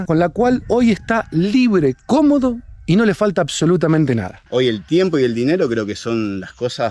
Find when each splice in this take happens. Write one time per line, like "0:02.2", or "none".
0:04.4